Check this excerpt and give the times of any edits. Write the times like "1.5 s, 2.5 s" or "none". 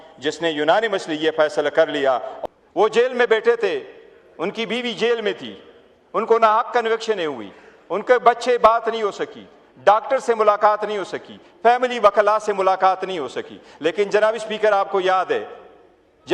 2.3 s